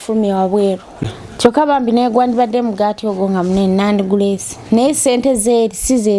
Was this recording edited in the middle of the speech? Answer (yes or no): yes